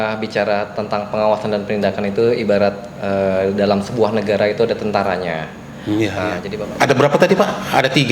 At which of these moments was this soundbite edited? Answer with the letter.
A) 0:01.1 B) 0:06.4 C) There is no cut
B